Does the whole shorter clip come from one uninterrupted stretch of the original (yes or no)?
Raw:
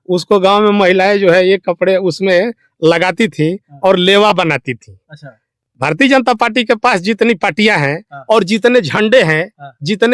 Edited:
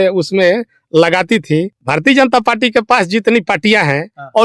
no